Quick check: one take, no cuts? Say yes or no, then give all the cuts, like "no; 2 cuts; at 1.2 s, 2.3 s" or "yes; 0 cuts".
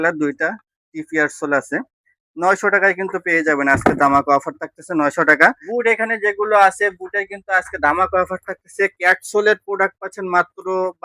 no; 1 cut; at 5.6 s